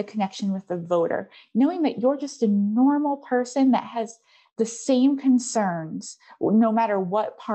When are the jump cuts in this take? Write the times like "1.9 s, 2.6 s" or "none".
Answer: none